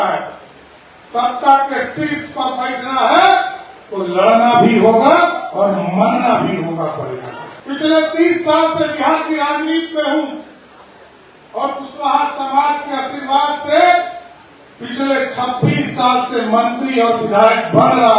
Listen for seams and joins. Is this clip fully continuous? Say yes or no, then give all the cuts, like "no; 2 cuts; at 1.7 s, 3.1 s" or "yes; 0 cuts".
no; 1 cut; at 7.5 s